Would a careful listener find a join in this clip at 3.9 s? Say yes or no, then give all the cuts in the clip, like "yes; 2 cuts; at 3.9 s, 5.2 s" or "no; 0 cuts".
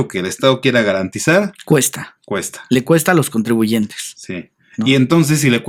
no; 0 cuts